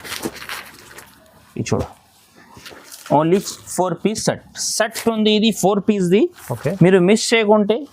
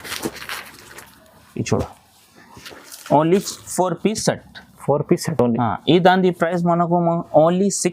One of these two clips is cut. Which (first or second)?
first